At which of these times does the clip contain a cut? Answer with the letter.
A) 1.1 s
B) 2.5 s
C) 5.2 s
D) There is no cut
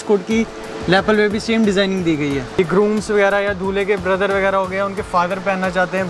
B